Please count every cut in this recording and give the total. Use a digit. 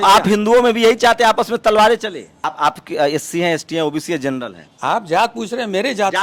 1